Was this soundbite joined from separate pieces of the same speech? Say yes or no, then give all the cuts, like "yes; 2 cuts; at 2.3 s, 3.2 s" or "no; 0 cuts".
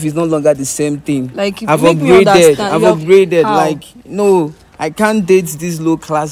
no; 0 cuts